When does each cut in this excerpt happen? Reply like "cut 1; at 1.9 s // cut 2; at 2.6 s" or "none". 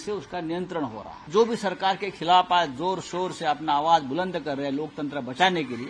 cut 1; at 1.2 s